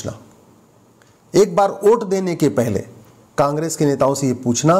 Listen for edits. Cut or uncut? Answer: uncut